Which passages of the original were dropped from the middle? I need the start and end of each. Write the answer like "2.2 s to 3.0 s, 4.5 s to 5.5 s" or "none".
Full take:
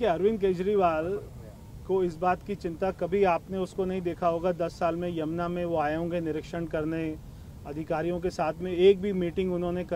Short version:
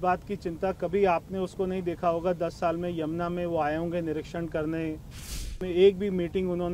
7.8 s to 8.6 s